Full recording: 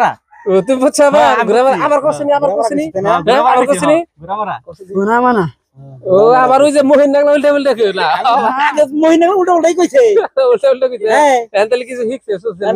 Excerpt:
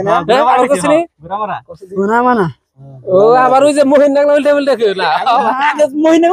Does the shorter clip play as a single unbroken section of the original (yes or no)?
yes